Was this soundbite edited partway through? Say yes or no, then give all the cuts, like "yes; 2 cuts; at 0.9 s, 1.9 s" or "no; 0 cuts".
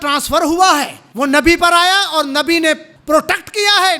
yes; 2 cuts; at 1.0 s, 2.9 s